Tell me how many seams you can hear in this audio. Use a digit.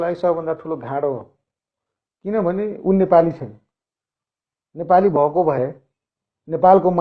0